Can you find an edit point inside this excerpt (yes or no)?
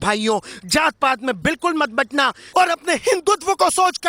yes